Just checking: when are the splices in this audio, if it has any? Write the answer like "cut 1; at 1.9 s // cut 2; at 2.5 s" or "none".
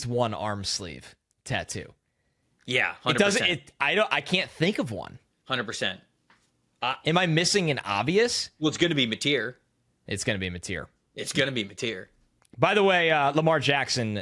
cut 1; at 12.6 s